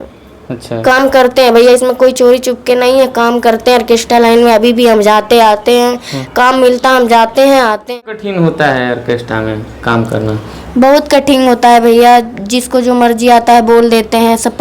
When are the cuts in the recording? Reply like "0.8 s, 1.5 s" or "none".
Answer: 7.9 s